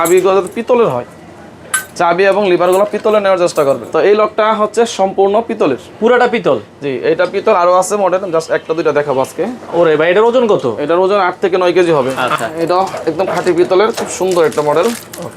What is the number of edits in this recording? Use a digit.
2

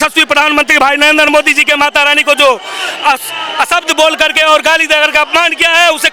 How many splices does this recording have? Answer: 0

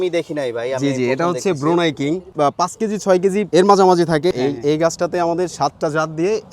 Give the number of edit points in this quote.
3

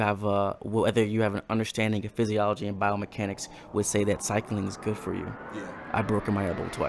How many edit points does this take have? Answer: 0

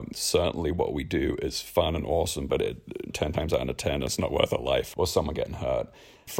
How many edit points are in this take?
0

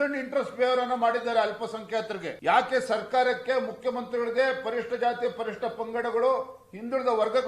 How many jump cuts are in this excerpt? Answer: 1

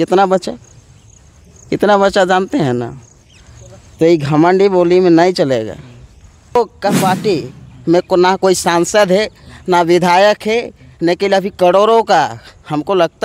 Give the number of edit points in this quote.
1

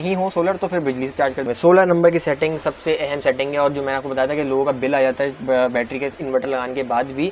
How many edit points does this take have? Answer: 1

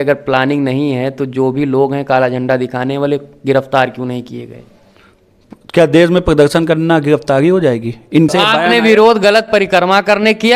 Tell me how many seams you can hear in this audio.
1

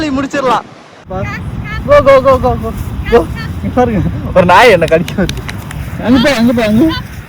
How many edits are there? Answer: 1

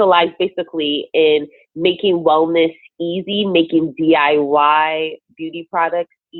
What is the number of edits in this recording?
0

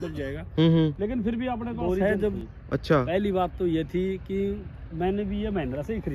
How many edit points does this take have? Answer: 1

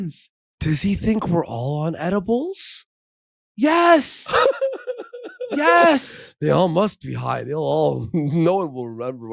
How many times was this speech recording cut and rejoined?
0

